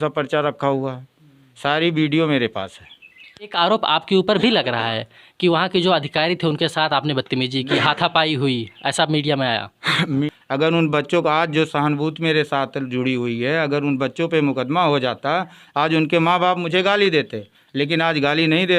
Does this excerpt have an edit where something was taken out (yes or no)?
yes